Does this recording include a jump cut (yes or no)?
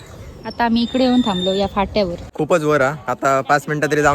yes